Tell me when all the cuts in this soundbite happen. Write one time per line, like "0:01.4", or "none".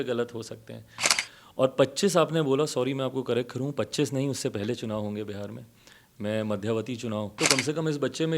0:01.0
0:07.3